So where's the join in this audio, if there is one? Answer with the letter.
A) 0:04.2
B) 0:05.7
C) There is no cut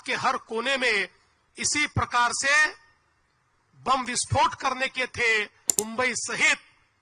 B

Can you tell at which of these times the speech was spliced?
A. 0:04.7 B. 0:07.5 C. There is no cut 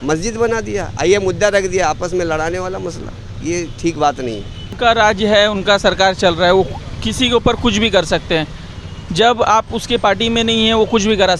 A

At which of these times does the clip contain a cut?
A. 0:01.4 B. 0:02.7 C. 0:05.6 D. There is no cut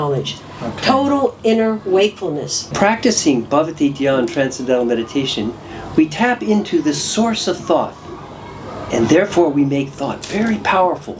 B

